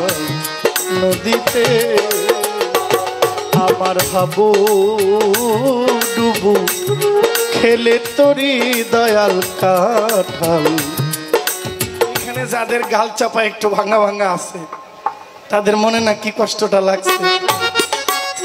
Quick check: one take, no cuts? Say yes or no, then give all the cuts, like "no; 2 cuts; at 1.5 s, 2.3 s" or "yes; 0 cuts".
no; 1 cut; at 12.4 s